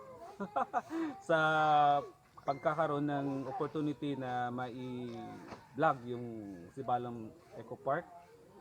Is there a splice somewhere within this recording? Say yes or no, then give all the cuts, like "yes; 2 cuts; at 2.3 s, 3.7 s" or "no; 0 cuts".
no; 0 cuts